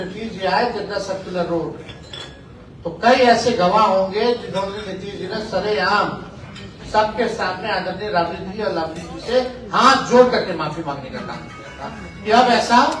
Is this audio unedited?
yes; 0 cuts

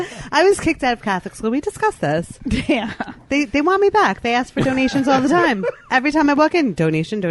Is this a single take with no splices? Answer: no; 1 cut; at 5.8 s

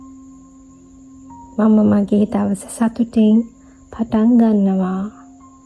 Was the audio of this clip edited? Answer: yes; 1 cut; at 1.0 s

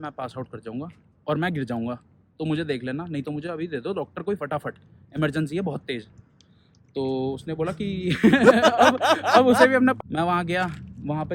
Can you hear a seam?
yes; 1 cut; at 10.0 s

